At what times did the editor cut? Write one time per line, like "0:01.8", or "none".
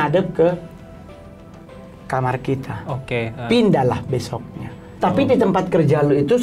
0:04.8